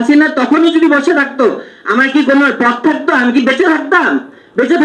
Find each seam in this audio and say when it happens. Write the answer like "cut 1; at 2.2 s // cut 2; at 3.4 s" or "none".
none